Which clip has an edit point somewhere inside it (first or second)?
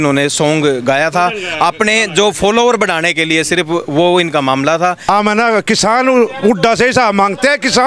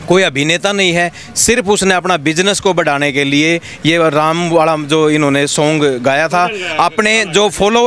first